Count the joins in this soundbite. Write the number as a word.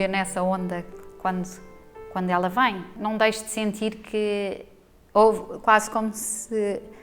one